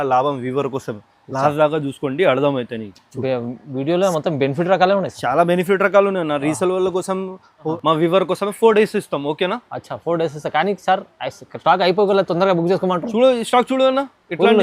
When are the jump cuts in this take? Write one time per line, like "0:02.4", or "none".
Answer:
0:07.7

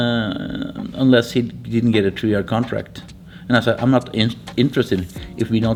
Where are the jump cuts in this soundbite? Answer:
none

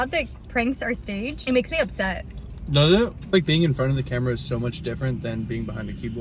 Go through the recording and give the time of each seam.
0:03.2

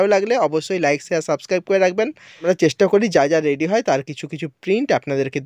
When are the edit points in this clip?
0:02.3

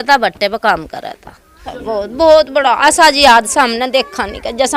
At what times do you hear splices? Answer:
none

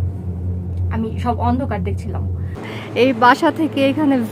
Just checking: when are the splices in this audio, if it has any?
0:02.7

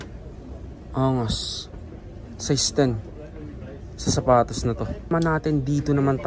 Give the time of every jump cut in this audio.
0:05.1

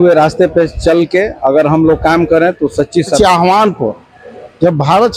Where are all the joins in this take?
0:03.2

